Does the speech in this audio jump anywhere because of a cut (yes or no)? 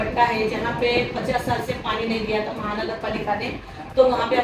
no